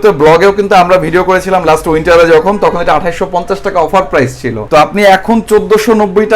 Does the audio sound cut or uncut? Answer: uncut